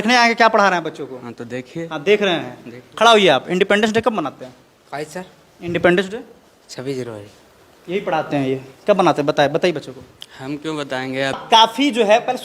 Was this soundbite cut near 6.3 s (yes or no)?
no